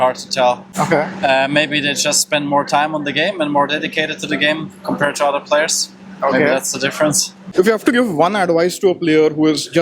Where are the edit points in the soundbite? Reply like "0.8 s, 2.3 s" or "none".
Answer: 7.4 s